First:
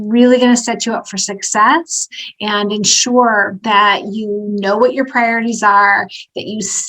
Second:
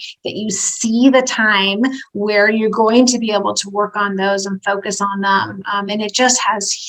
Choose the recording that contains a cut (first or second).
first